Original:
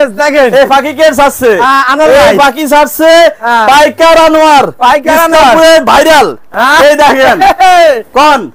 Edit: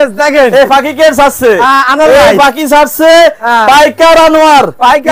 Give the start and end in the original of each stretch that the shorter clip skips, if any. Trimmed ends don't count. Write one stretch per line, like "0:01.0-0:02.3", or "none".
none